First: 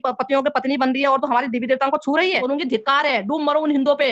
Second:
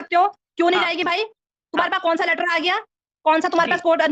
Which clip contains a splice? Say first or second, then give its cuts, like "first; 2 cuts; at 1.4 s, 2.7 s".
first; 1 cut; at 2.4 s